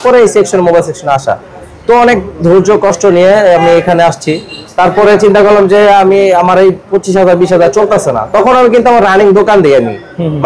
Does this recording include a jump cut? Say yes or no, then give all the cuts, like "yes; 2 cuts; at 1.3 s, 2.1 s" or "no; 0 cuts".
no; 0 cuts